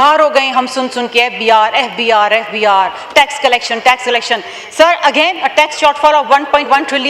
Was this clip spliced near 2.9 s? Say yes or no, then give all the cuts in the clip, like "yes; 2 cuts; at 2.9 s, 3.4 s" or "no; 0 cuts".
no; 0 cuts